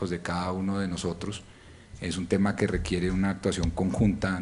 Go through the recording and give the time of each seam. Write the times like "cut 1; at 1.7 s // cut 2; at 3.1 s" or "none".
cut 1; at 1.2 s